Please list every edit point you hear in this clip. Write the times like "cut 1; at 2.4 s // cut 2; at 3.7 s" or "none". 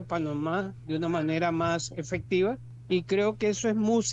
cut 1; at 2.7 s